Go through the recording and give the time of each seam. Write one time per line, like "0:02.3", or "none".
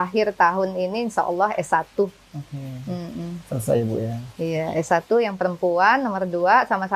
none